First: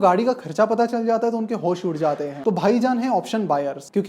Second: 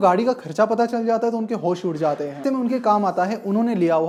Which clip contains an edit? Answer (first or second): first